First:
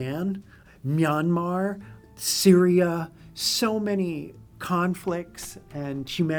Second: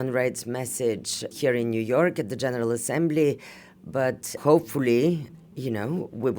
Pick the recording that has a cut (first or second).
second